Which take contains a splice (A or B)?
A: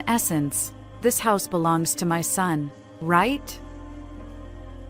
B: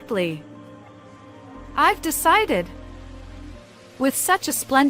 A